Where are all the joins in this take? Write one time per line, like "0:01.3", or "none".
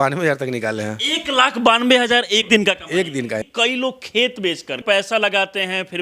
0:02.4
0:03.5
0:04.8